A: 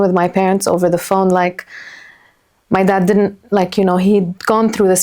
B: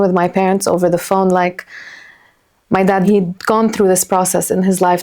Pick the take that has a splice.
B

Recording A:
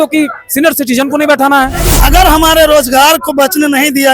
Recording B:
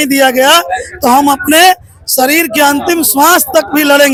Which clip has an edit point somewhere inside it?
A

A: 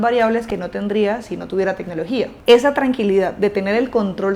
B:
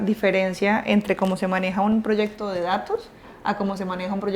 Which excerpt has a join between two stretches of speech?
A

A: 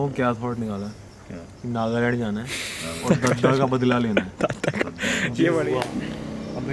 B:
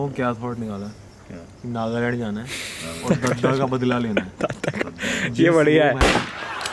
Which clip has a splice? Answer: A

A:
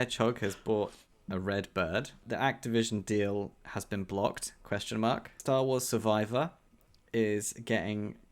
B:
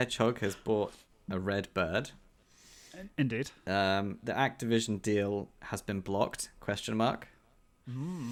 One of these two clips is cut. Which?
A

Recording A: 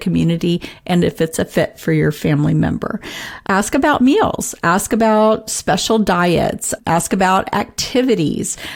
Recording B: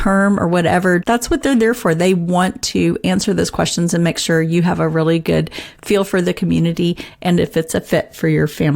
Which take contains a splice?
B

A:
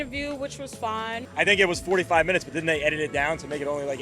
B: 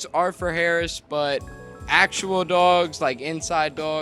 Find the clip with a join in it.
A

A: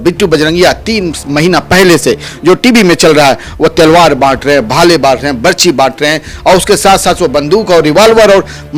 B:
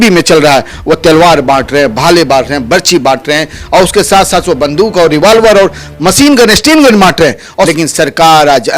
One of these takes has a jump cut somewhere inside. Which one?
B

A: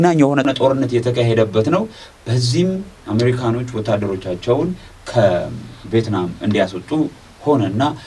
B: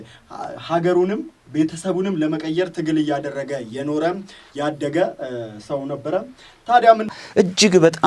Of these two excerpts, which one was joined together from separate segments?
B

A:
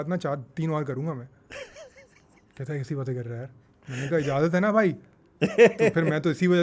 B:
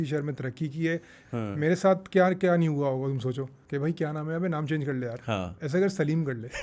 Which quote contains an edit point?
B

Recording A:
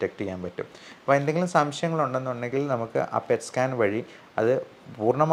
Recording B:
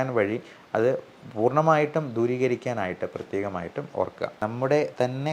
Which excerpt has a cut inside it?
B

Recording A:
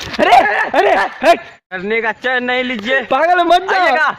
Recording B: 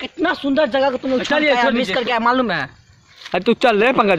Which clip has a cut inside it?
A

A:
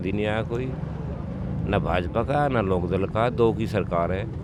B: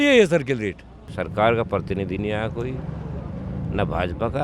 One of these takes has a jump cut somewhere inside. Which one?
B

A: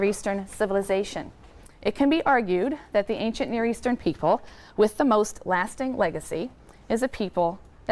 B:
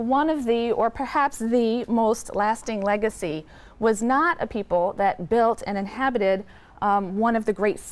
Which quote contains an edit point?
B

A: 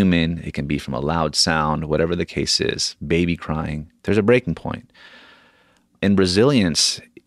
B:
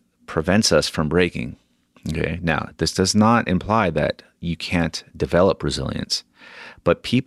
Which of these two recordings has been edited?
A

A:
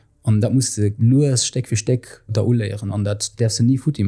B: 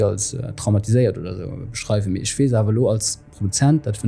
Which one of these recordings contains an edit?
A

